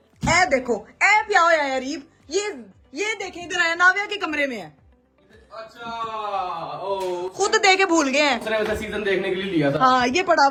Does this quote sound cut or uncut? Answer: uncut